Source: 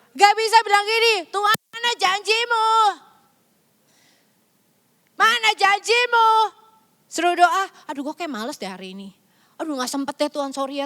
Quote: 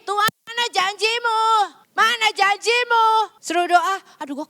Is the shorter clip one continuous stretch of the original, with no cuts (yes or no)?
no